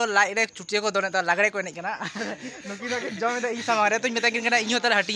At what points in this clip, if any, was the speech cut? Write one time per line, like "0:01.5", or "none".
none